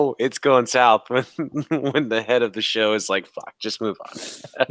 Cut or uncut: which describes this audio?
uncut